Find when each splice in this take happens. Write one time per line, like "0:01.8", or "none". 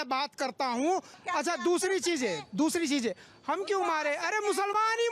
0:01.2